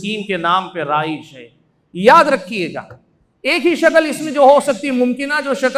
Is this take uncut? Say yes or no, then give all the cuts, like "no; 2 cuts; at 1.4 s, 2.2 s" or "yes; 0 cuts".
yes; 0 cuts